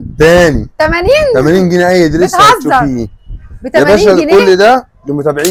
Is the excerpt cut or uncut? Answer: uncut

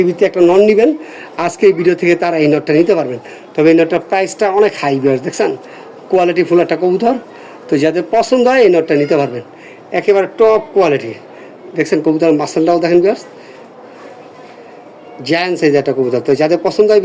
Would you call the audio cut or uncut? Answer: uncut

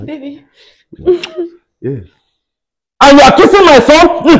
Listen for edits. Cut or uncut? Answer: uncut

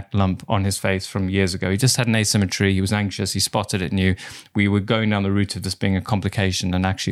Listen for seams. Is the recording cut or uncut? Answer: uncut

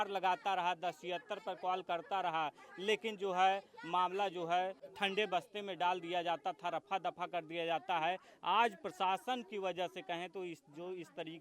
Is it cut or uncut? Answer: cut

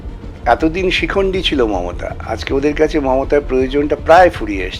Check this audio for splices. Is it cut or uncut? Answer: uncut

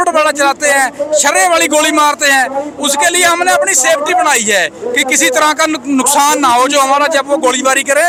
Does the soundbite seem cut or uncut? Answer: uncut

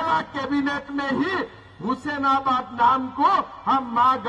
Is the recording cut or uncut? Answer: uncut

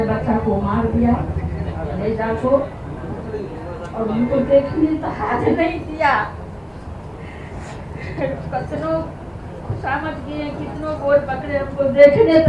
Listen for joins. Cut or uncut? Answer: uncut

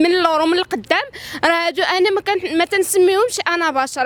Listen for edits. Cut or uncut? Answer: uncut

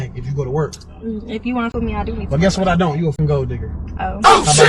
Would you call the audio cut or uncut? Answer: cut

